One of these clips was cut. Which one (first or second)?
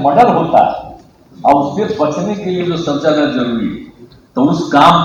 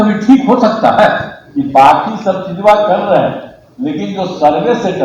second